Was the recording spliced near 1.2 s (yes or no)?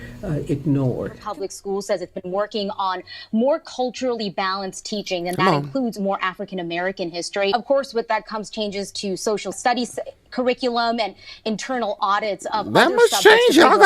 yes